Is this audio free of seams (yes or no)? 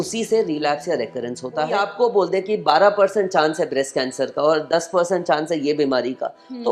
no